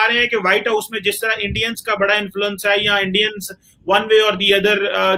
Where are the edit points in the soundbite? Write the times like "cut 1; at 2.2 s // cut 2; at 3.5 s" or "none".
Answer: none